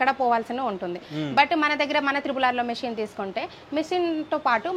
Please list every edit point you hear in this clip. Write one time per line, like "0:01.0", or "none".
none